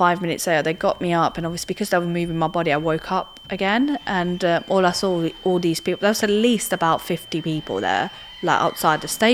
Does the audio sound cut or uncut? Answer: uncut